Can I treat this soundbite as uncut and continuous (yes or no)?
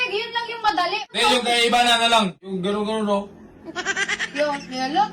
no